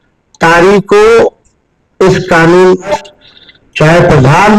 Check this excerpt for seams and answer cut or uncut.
cut